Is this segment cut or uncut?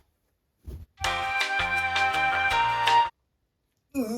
cut